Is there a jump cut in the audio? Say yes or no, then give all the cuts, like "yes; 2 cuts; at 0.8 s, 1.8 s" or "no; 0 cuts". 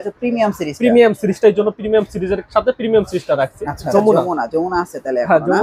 yes; 1 cut; at 3.9 s